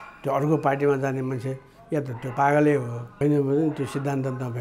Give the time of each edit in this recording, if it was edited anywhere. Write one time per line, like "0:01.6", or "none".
0:03.0